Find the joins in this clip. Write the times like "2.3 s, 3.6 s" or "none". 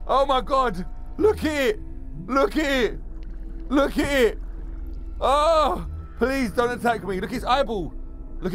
none